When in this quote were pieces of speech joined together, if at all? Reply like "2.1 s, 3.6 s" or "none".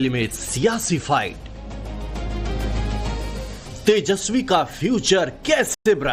none